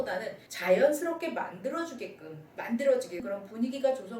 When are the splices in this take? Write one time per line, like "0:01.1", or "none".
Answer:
0:03.2